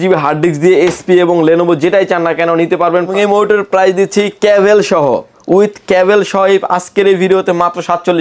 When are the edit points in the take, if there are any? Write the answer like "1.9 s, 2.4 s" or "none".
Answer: 3.1 s